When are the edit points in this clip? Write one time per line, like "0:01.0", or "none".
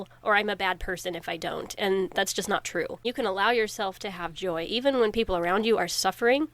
0:03.0